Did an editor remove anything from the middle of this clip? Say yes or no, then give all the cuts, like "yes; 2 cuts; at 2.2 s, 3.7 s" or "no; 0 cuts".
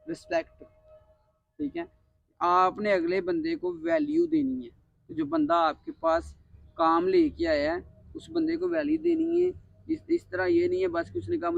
no; 0 cuts